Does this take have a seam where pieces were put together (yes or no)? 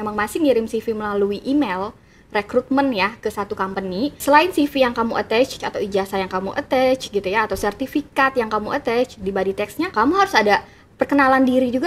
yes